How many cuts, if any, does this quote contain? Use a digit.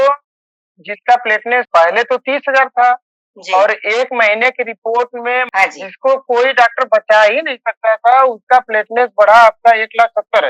2